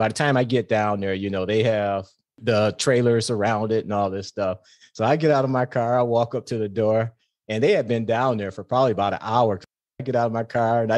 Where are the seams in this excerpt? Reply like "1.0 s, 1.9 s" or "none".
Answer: 10.0 s

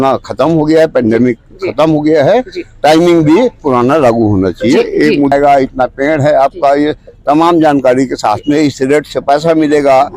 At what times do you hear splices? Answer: 5.3 s

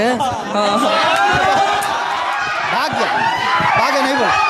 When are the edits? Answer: 2.3 s

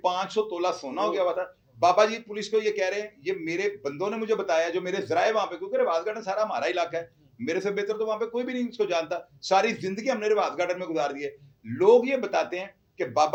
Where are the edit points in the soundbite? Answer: none

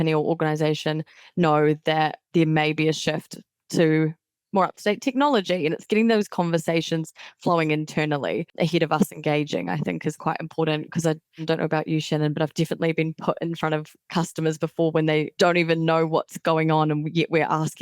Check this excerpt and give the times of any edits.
2.2 s, 8.5 s, 11.4 s, 15.3 s

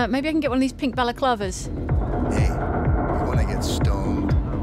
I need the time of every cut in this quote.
none

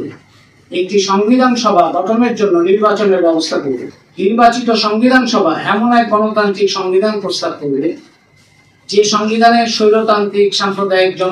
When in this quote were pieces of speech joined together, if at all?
3.9 s

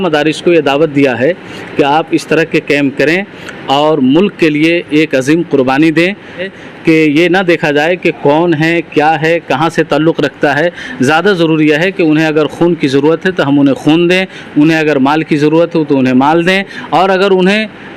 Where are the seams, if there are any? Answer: 6.5 s

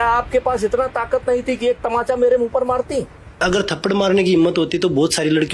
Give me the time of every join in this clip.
3.4 s

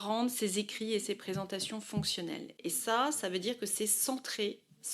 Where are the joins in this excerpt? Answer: none

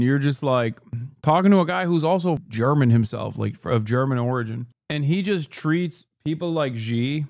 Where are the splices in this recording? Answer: 2.5 s

